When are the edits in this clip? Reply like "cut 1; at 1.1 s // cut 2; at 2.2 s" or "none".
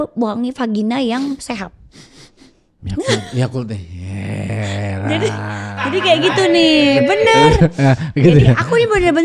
none